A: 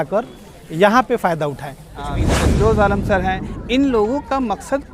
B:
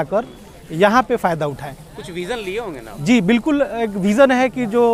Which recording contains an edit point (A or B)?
A